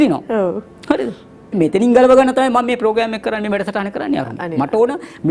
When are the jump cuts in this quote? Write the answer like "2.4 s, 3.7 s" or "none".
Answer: 1.5 s